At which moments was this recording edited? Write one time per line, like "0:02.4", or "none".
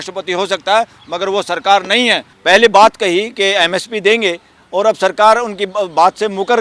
0:02.3